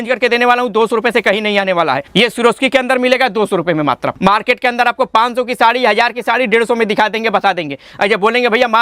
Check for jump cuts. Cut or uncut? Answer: cut